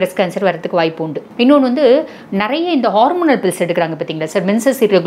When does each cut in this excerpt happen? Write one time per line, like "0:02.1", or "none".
0:01.2